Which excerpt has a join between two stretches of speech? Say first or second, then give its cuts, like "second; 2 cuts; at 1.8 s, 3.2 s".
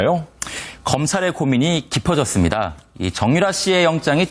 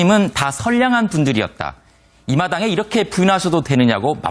second; 1 cut; at 1.6 s